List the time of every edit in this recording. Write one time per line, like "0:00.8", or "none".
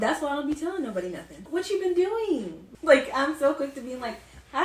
0:01.4
0:02.7